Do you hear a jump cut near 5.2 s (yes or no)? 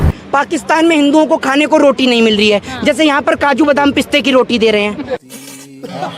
yes